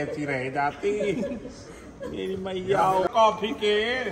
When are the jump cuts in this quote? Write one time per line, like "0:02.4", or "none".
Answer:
0:03.1